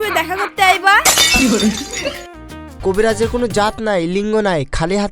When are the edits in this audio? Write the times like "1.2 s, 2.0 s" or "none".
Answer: 2.7 s